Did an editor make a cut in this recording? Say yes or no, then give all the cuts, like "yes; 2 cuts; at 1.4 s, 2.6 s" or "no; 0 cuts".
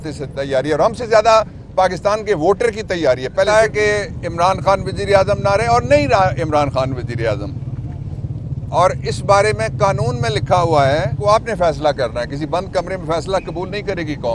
yes; 2 cuts; at 3.5 s, 11.2 s